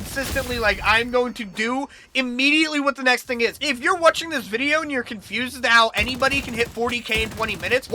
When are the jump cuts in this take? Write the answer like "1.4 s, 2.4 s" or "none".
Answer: 3.6 s